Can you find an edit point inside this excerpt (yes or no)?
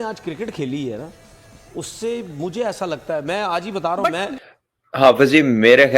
yes